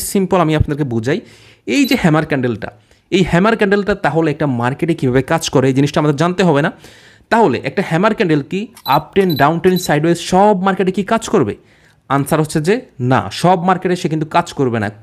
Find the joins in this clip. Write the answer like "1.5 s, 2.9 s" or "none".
none